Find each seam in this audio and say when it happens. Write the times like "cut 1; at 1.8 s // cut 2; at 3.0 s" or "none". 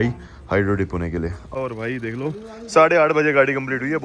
cut 1; at 1.6 s